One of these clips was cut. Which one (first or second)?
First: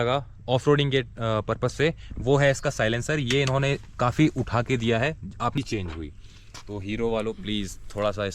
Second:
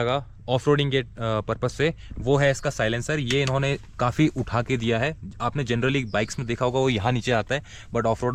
first